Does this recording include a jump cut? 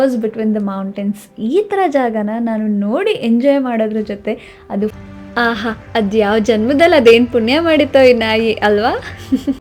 yes; 1 cut; at 5.0 s

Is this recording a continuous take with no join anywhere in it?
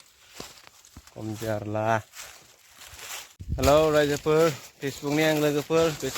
no; 1 cut; at 3.4 s

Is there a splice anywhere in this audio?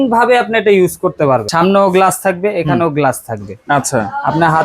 yes; 1 cut; at 1.5 s

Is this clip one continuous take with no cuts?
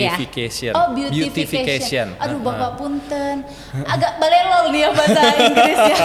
yes; 0 cuts

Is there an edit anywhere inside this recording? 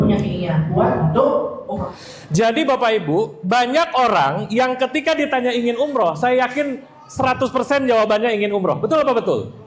yes; 1 cut; at 1.7 s

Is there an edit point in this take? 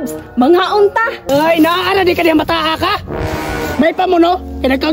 yes; 1 cut; at 1.2 s

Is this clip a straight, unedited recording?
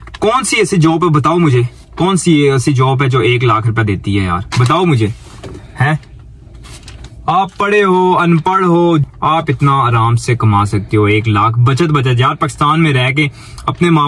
no; 1 cut; at 9.0 s

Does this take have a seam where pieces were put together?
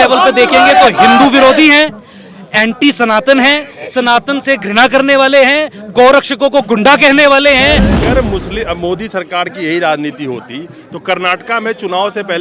yes; 1 cut; at 8.0 s

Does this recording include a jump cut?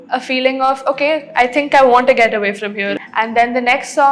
yes; 1 cut; at 2.9 s

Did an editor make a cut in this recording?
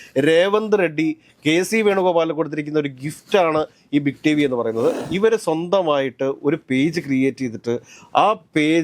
yes; 1 cut; at 5.0 s

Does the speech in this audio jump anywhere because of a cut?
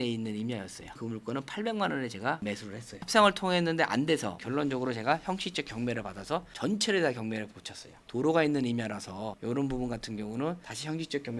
no; 0 cuts

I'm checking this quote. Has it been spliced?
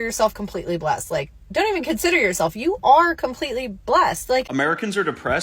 yes; 1 cut; at 4.5 s

